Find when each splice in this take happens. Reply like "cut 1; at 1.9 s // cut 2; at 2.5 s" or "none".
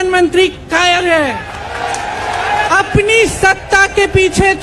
cut 1; at 2.7 s